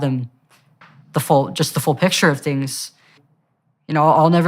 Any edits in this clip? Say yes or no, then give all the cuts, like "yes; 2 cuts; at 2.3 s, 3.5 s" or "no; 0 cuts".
yes; 1 cut; at 3.2 s